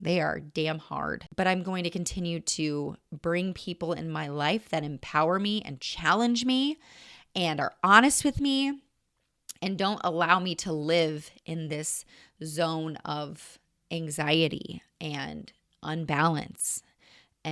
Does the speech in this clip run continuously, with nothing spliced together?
no; 1 cut; at 1.2 s

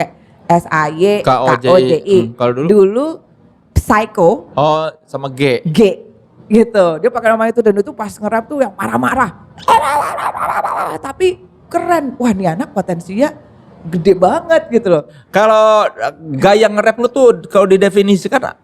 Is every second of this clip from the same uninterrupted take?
no; 1 cut; at 15.2 s

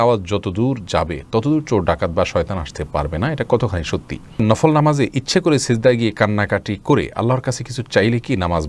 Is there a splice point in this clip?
yes; 1 cut; at 4.4 s

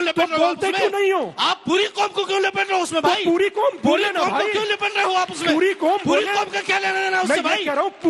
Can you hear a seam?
no; 0 cuts

